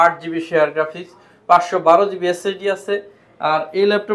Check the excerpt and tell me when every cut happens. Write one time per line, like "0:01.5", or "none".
none